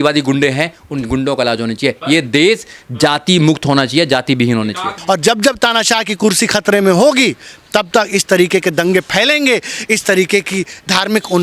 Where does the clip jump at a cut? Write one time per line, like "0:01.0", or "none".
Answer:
0:05.0